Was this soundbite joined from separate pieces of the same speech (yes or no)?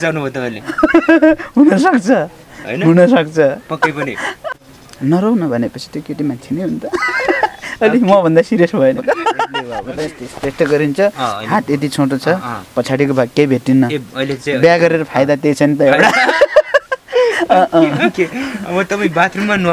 yes